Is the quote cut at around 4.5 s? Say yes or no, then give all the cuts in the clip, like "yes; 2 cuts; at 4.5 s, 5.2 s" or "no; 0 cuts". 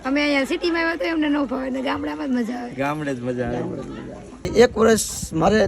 yes; 1 cut; at 4.5 s